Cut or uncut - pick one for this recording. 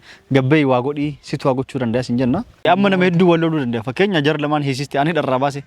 cut